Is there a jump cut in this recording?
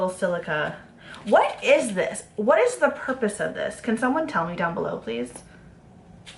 no; 0 cuts

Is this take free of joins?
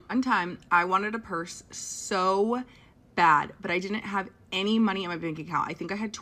yes; 0 cuts

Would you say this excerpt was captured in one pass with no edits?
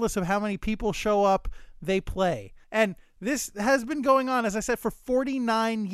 no; 1 cut; at 2.6 s

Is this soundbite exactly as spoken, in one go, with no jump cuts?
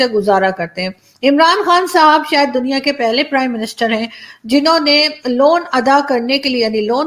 yes; 0 cuts

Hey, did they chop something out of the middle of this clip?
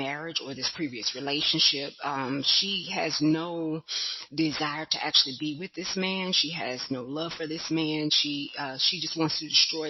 no; 0 cuts

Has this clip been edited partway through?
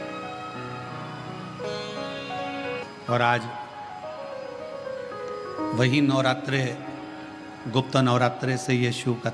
yes; 1 cut; at 2.8 s

